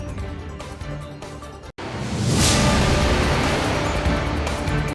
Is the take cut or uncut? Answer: cut